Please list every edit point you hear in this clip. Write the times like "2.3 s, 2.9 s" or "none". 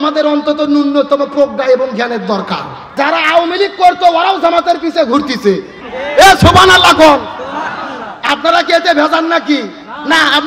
2.8 s